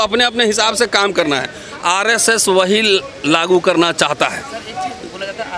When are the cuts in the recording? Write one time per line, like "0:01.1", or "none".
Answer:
none